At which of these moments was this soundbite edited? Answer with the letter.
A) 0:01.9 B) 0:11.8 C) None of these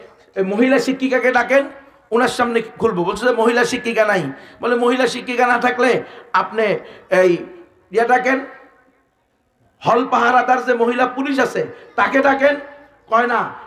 C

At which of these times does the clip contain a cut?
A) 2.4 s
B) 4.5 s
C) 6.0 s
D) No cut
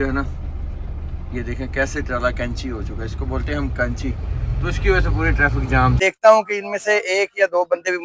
C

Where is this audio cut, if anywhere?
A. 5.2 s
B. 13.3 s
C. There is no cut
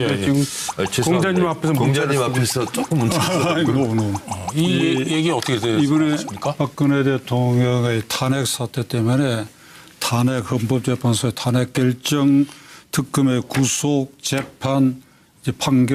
C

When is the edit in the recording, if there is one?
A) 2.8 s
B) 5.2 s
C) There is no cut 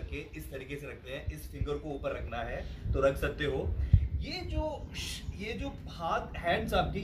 C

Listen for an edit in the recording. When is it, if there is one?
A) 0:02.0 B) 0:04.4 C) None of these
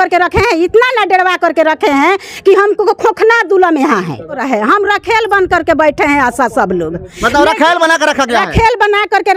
B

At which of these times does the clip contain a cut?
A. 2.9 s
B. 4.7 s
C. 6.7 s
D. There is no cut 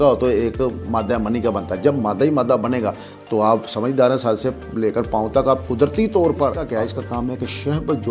C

